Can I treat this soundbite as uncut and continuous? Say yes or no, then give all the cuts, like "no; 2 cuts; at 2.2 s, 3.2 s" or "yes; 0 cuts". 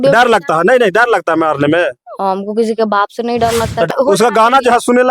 no; 1 cut; at 3.9 s